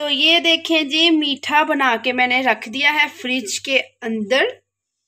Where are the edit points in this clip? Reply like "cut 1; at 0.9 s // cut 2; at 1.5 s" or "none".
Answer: none

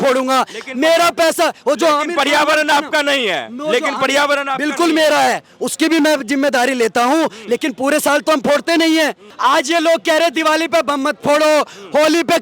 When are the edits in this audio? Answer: cut 1; at 9.3 s

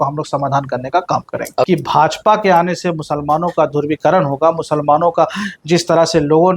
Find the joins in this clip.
cut 1; at 1.7 s

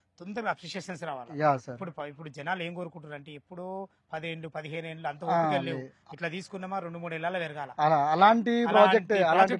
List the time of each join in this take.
none

